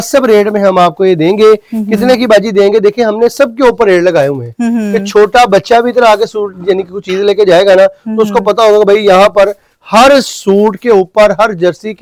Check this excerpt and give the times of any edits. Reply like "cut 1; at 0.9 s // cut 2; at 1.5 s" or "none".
none